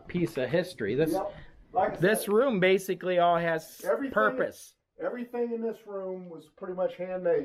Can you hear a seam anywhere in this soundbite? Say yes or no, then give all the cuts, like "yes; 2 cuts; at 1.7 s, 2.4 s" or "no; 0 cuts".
no; 0 cuts